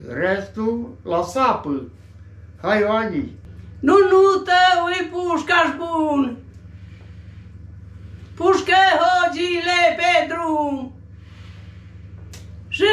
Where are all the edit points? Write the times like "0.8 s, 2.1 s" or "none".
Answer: 3.4 s